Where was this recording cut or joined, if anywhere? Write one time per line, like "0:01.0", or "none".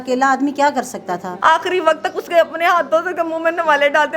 0:01.3